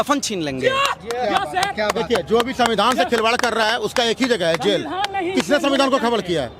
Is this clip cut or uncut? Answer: uncut